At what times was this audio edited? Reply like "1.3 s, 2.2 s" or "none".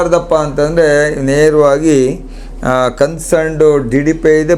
none